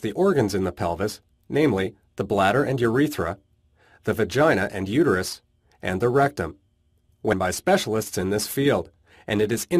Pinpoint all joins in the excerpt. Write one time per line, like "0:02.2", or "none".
none